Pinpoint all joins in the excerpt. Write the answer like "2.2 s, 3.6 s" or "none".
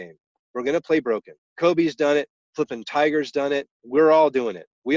1.4 s, 2.4 s, 3.8 s